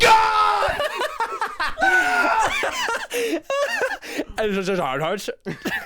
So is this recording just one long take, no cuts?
yes; 0 cuts

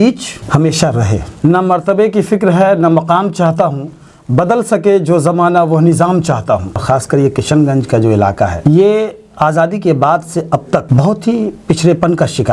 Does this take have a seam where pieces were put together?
yes; 2 cuts; at 1.3 s, 6.8 s

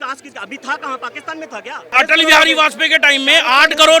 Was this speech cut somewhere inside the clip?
yes; 1 cut; at 1.9 s

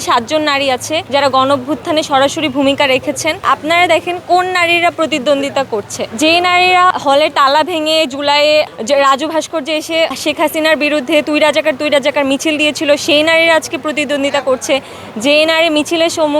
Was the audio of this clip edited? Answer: yes; 4 cuts; at 1.0 s, 3.4 s, 6.9 s, 10.2 s

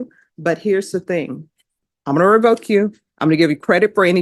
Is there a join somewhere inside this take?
yes; 1 cut; at 1.9 s

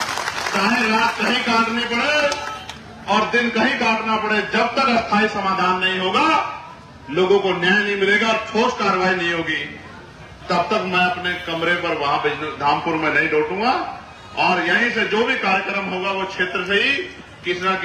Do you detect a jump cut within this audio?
no; 0 cuts

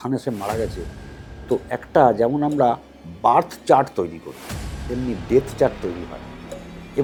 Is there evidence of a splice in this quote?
no; 0 cuts

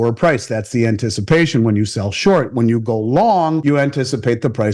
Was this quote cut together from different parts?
yes; 1 cut; at 3.6 s

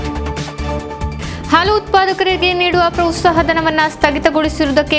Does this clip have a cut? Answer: no; 0 cuts

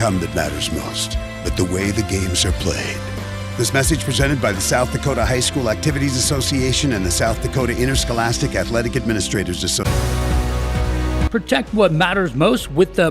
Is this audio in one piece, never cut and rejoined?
no; 2 cuts; at 9.8 s, 11.4 s

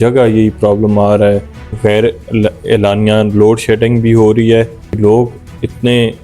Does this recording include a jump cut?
yes; 2 cuts; at 1.7 s, 4.8 s

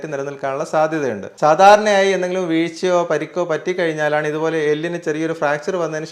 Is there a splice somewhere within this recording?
yes; 1 cut; at 1.3 s

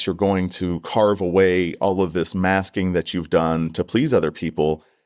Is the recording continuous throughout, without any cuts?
yes; 0 cuts

